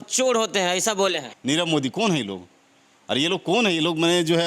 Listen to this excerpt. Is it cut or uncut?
cut